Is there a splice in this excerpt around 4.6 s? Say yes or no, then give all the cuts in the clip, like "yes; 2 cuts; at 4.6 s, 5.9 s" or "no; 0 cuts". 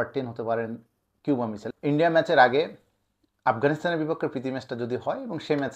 no; 1 cut; at 1.7 s